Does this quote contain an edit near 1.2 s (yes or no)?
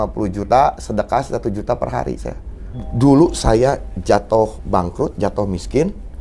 no